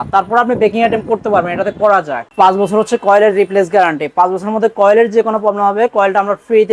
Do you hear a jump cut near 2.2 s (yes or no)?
yes